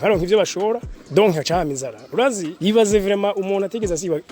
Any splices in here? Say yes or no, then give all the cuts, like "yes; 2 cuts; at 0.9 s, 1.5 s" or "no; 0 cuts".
yes; 2 cuts; at 0.9 s, 2.5 s